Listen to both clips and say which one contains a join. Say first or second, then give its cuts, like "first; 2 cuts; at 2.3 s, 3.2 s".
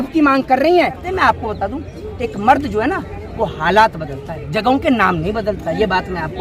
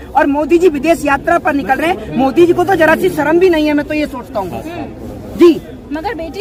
first; 1 cut; at 1.0 s